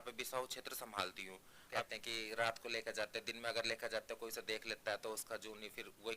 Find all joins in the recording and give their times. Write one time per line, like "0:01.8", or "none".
0:01.9